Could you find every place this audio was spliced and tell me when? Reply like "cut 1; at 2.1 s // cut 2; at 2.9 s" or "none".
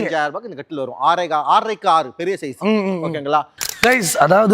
cut 1; at 3.6 s